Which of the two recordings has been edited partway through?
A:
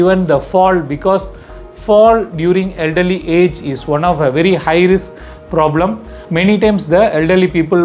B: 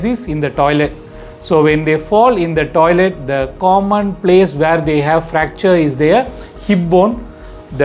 A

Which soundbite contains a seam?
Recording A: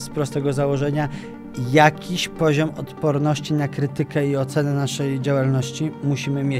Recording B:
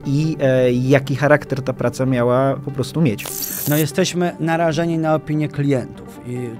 B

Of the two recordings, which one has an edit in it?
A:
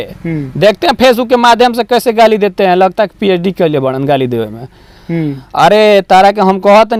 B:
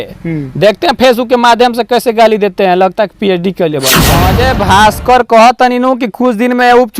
B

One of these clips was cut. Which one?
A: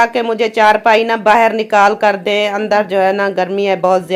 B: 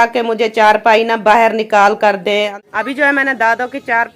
B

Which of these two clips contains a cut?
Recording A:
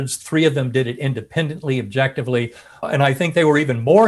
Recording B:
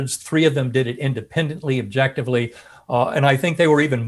A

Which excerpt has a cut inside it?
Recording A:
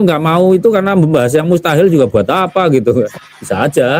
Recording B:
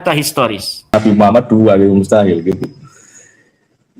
B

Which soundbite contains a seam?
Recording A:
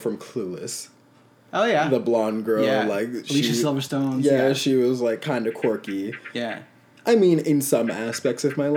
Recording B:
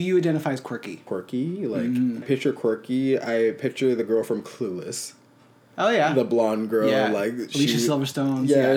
B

